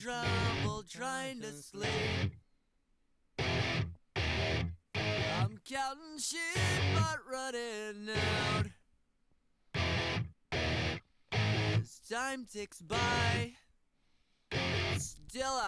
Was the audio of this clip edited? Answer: yes; 1 cut; at 7.9 s

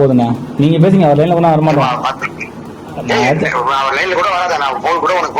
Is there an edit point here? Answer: no; 0 cuts

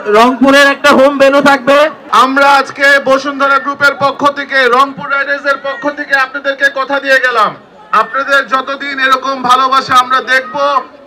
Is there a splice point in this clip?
yes; 1 cut; at 2.0 s

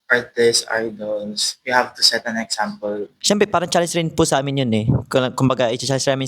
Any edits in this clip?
yes; 1 cut; at 3.1 s

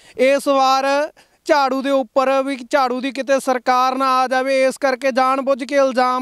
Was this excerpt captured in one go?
yes; 0 cuts

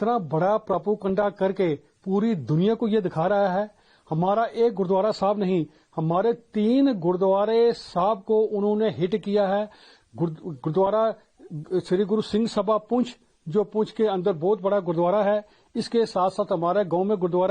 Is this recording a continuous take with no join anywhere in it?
yes; 0 cuts

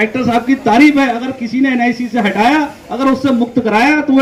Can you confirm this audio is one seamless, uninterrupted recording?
yes; 0 cuts

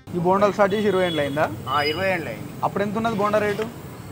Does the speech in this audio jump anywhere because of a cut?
no; 0 cuts

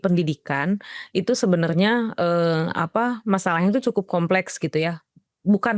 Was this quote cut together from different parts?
no; 0 cuts

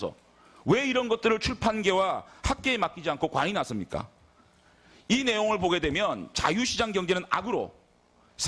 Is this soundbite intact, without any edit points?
yes; 0 cuts

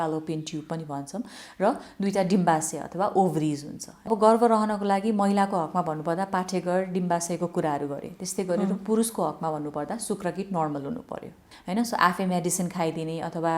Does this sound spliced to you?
yes; 2 cuts; at 4.1 s, 11.5 s

